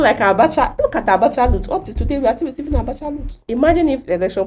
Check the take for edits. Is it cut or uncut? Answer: cut